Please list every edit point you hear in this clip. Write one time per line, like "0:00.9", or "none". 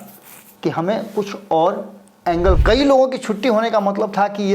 0:02.6